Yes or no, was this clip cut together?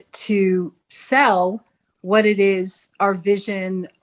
no